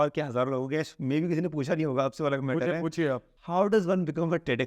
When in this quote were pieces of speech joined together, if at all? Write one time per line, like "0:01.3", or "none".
0:03.3